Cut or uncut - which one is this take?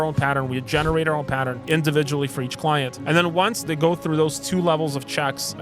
cut